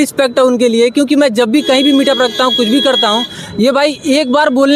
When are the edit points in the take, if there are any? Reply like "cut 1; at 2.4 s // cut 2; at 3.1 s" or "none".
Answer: none